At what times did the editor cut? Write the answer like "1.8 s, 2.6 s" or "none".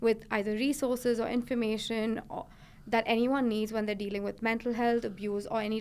none